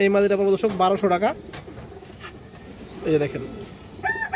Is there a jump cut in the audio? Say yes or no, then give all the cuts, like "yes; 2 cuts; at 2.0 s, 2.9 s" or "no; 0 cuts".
no; 0 cuts